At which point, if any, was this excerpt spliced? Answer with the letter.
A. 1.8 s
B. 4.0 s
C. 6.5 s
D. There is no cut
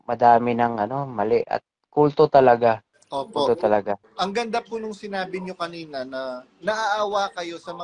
B